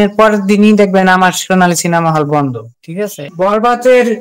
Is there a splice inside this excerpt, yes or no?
yes